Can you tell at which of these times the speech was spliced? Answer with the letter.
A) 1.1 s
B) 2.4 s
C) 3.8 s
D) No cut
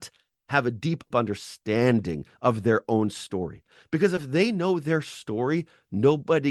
A